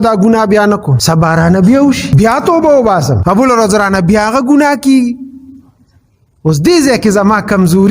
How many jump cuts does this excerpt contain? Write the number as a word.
three